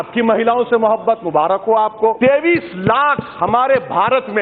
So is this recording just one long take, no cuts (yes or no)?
no